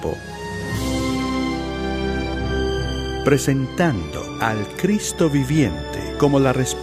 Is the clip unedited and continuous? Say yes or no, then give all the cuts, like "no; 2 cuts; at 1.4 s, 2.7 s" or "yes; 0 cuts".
yes; 0 cuts